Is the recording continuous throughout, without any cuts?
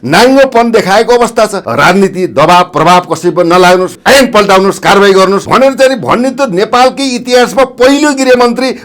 no; 3 cuts; at 1.6 s, 4.0 s, 5.4 s

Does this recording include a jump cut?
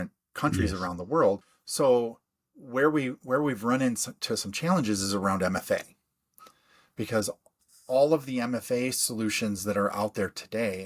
yes; 1 cut; at 1.6 s

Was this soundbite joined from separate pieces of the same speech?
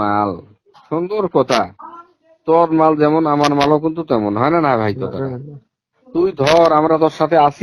no; 0 cuts

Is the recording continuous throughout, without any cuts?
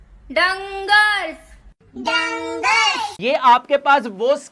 no; 1 cut; at 3.1 s

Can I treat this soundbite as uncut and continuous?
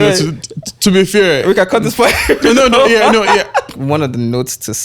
no; 1 cut; at 3.7 s

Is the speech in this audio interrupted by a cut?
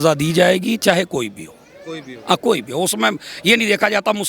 no; 0 cuts

